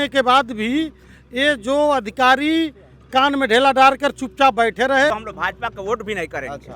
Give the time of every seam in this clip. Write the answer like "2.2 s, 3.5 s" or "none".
5.1 s